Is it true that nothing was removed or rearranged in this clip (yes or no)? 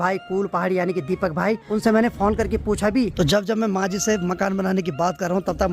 no